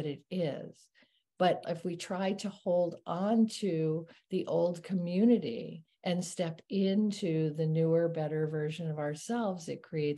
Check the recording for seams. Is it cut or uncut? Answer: cut